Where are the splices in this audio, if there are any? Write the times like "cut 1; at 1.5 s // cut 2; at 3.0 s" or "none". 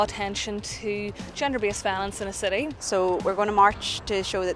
cut 1; at 2.8 s